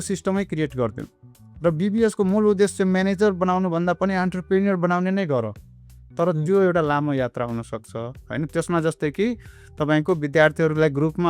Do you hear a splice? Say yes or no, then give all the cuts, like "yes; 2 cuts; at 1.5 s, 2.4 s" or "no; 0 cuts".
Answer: no; 0 cuts